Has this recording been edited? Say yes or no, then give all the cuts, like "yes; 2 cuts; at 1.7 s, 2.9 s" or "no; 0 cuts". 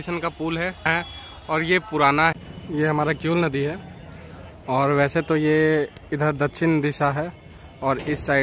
yes; 2 cuts; at 0.9 s, 2.3 s